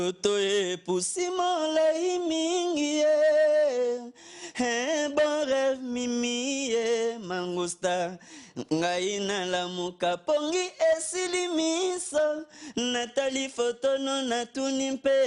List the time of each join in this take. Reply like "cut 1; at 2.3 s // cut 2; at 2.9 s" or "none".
none